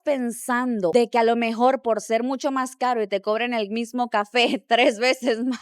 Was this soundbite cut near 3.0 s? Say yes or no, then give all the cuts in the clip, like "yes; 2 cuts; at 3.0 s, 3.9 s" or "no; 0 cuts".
no; 1 cut; at 0.9 s